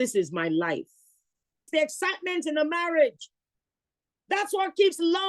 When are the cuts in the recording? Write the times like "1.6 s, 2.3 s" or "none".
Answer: 1.7 s